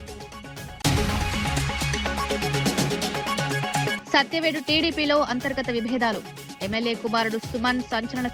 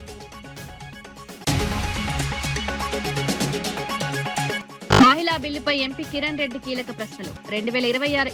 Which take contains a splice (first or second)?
first